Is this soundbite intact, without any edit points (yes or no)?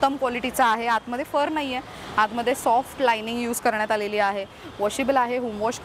yes